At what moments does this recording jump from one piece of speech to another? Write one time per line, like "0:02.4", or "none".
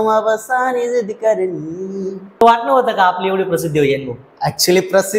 0:02.4